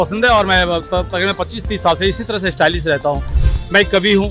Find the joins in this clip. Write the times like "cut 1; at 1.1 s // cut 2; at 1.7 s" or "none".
cut 1; at 3.3 s